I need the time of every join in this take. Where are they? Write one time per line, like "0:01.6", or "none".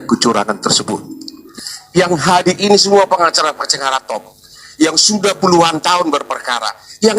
0:01.4